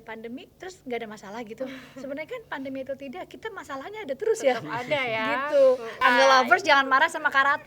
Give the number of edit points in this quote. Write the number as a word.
one